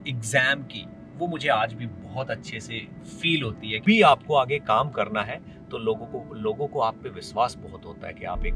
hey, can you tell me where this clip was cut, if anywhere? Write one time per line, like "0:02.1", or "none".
0:03.7